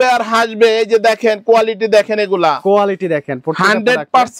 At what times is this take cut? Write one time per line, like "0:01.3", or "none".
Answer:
none